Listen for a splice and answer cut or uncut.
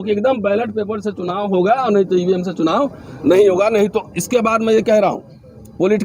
uncut